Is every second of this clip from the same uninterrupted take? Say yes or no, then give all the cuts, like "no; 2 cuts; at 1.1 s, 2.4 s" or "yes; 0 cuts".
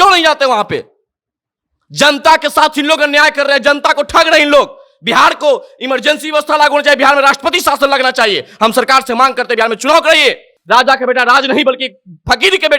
no; 1 cut; at 10.5 s